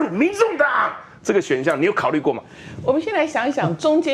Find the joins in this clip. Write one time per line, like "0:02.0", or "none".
none